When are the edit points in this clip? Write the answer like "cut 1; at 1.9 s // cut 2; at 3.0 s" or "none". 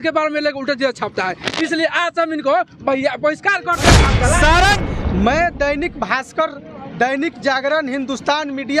cut 1; at 4.8 s